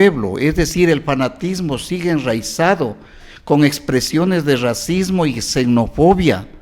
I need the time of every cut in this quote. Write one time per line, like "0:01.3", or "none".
none